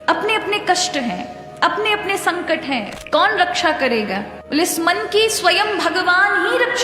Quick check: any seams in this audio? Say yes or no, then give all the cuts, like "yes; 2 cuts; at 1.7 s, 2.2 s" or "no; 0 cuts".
yes; 1 cut; at 2.9 s